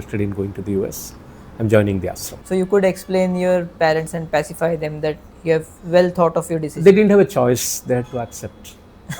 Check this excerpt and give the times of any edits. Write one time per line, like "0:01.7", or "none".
0:02.3

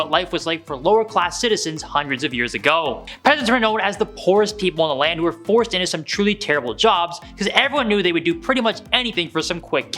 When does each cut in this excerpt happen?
0:03.1

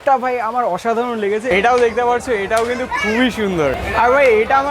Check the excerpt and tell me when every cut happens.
0:01.5

